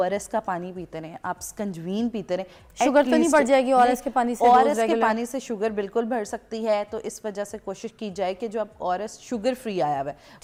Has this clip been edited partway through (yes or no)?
no